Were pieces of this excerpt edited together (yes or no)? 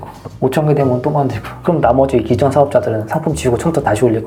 no